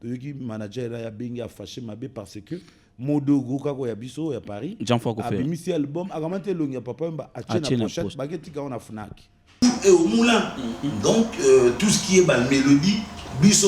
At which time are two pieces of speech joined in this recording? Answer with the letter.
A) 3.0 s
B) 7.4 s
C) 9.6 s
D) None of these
C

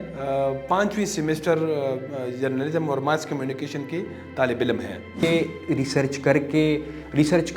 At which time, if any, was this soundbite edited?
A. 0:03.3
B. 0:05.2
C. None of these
B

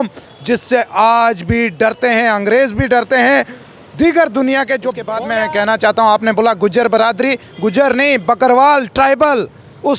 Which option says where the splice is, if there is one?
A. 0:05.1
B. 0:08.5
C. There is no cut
A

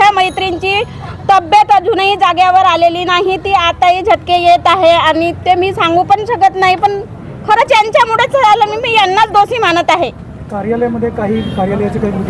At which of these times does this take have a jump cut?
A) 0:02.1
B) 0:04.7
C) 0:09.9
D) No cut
D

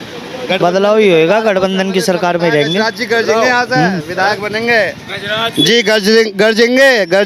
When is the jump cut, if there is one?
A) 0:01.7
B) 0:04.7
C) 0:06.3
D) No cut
D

